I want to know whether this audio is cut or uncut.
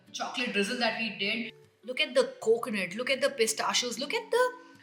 cut